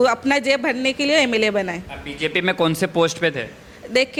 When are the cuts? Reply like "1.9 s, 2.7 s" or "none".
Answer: none